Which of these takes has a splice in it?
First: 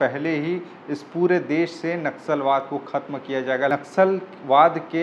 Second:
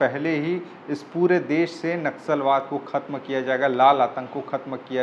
first; 1 cut; at 3.7 s

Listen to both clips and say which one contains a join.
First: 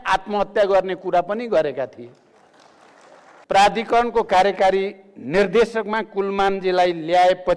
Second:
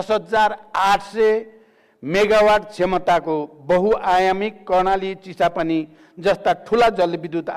first; 1 cut; at 3.4 s

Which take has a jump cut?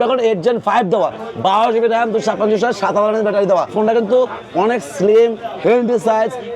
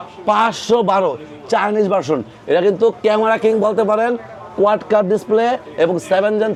first; 1 cut; at 3.7 s

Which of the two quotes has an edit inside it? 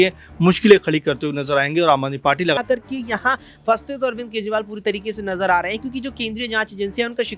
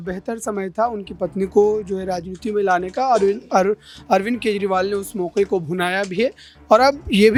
first; 1 cut; at 2.6 s

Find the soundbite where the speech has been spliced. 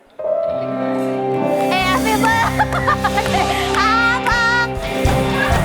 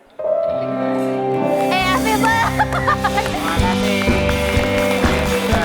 second; 1 cut; at 3.3 s

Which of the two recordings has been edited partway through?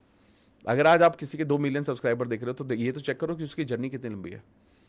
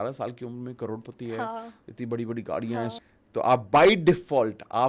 second; 1 cut; at 3.0 s

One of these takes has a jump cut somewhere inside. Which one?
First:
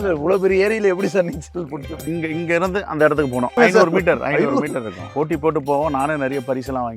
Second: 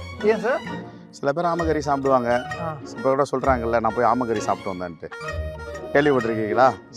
first; 3 cuts; at 2.0 s, 3.5 s, 5.0 s

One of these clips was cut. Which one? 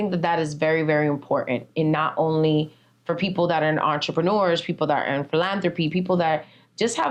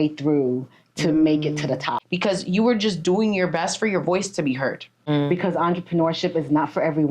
second; 2 cuts; at 2.0 s, 4.9 s

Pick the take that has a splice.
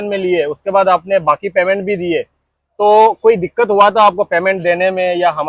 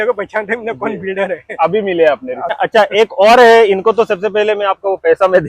second; 1 cut; at 2.6 s

